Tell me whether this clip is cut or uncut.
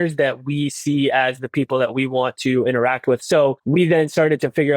cut